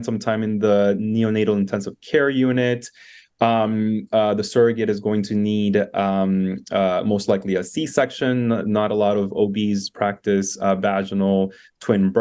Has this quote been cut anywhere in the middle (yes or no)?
no